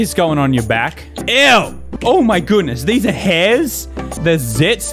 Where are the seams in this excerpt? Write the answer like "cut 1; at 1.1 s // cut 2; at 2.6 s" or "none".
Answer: cut 1; at 1.8 s